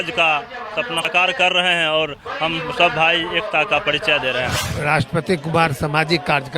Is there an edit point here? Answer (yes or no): yes